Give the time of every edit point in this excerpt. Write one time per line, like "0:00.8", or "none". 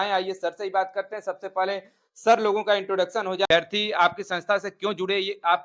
0:03.5

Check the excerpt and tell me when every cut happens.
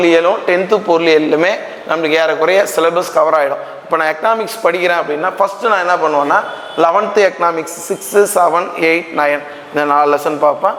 none

